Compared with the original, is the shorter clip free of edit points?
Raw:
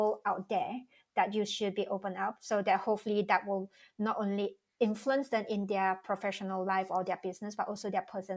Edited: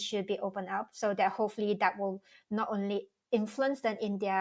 yes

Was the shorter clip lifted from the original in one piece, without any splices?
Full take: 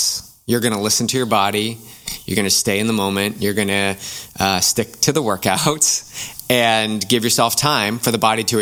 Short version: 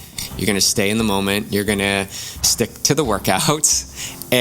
no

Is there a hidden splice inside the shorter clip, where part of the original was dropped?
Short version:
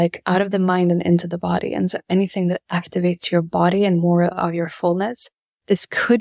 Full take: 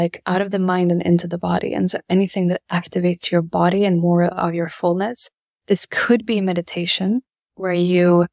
no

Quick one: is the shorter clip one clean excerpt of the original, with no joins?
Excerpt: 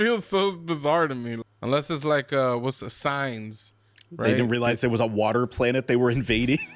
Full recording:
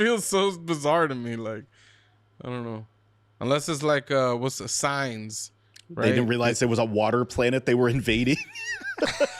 no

